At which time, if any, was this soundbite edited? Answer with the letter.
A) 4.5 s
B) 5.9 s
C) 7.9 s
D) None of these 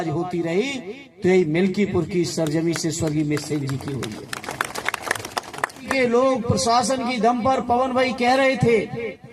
B